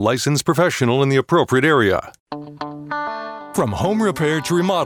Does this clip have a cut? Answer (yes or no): yes